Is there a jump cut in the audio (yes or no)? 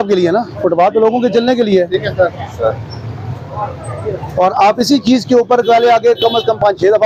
no